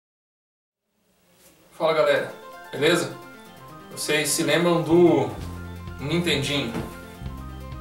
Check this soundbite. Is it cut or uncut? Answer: uncut